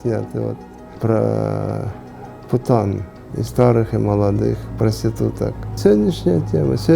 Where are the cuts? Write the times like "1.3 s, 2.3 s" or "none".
1.0 s